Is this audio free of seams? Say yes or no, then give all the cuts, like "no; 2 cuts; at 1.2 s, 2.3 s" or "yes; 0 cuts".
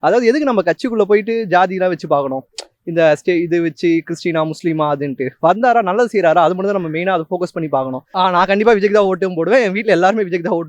no; 1 cut; at 8.0 s